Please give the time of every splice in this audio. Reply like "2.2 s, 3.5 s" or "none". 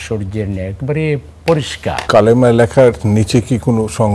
2.0 s